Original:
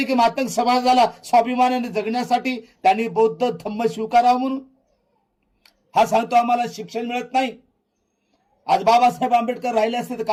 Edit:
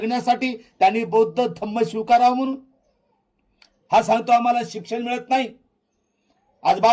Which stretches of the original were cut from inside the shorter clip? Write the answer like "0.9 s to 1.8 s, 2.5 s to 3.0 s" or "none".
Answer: none